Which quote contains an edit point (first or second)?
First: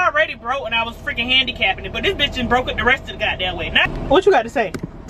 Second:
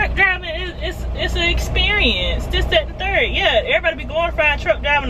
first